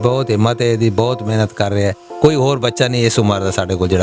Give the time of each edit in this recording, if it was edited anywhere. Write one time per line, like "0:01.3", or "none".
none